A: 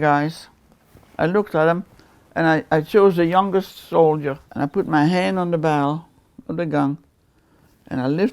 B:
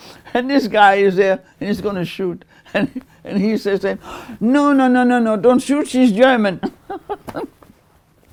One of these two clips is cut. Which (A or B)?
A